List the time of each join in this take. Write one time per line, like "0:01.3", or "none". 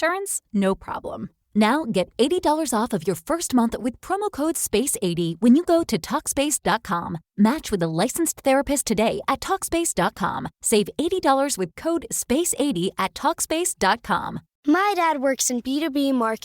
0:14.4